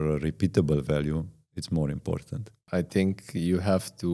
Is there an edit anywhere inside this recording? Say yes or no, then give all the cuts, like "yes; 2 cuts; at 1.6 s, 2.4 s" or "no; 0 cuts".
yes; 1 cut; at 2.5 s